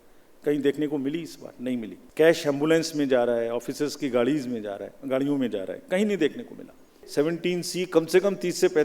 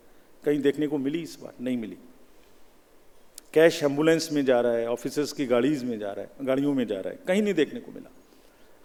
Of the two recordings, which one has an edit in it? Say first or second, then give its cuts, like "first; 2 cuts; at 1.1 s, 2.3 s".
first; 2 cuts; at 2.0 s, 7.0 s